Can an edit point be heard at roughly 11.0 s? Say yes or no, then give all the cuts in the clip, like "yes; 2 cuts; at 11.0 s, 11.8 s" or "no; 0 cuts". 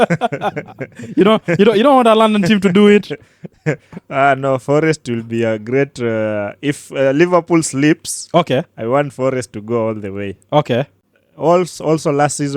yes; 1 cut; at 11.0 s